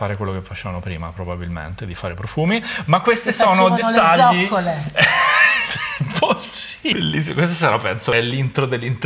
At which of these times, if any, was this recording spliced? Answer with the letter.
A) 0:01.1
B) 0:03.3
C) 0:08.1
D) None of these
C